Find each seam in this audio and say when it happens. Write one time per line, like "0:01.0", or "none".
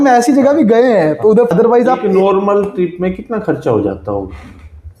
0:01.5